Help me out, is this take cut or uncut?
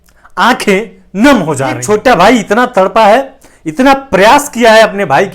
cut